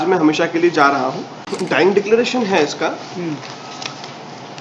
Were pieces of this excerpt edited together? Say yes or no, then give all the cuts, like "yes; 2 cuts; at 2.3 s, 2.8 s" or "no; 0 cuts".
yes; 1 cut; at 1.5 s